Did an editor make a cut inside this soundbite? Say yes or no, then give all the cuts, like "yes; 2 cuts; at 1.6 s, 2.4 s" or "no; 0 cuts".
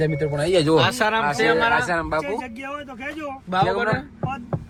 no; 0 cuts